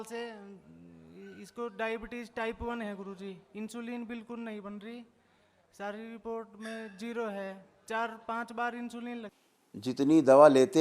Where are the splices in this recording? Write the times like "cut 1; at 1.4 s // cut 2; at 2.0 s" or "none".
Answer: cut 1; at 9.4 s